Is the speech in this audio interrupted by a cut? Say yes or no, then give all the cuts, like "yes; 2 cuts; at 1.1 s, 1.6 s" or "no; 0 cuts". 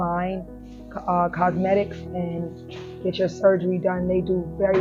no; 0 cuts